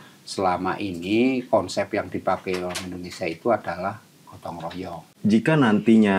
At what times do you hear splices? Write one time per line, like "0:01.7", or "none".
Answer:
0:05.0